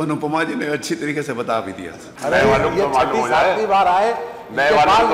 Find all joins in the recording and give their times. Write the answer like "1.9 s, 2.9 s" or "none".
2.1 s